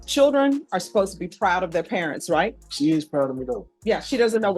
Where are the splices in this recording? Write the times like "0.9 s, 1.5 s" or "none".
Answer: 2.6 s, 3.6 s